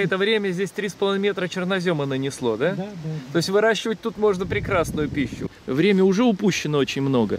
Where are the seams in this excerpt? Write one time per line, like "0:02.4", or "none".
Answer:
0:05.5